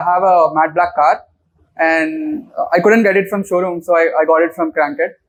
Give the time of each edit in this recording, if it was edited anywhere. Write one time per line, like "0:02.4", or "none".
none